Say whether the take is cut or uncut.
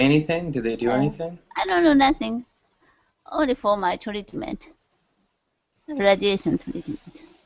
cut